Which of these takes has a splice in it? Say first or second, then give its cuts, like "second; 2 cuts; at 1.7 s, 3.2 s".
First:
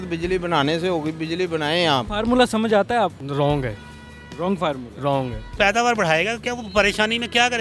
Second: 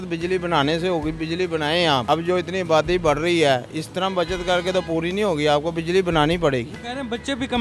first; 2 cuts; at 2.0 s, 5.5 s